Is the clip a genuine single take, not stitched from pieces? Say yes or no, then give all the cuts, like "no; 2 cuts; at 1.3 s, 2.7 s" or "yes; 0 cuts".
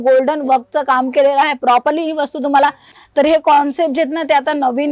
no; 1 cut; at 2.9 s